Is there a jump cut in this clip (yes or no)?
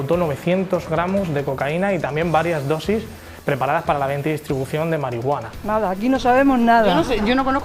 yes